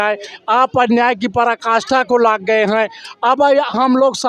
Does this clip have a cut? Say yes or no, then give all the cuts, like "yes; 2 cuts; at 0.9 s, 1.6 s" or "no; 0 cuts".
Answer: no; 0 cuts